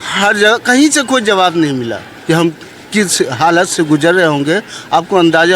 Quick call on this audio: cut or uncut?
cut